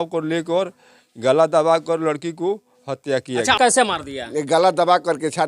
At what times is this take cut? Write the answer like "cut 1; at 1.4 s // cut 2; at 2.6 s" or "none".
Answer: cut 1; at 3.6 s